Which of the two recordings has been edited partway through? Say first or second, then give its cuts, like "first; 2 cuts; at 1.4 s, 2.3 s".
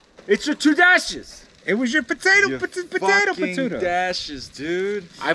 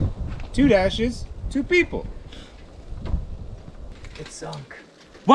second; 1 cut; at 3.9 s